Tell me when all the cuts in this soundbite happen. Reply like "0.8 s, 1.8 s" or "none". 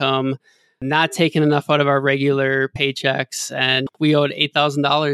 3.9 s